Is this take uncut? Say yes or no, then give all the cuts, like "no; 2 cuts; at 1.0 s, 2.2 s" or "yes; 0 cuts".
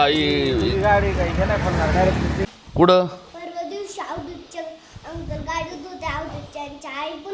no; 1 cut; at 2.4 s